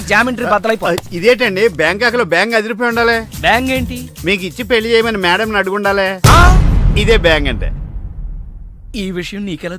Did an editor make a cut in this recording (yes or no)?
no